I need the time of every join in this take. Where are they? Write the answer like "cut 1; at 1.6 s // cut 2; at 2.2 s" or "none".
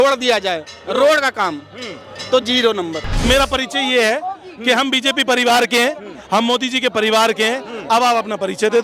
cut 1; at 3.2 s